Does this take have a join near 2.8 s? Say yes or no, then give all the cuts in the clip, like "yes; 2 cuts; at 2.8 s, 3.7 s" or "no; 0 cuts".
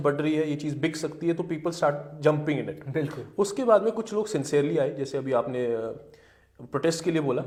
no; 0 cuts